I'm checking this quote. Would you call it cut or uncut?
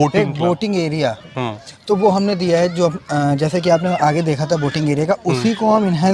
uncut